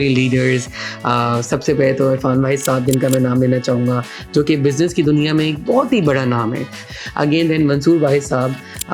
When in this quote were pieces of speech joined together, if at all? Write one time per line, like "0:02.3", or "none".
0:06.8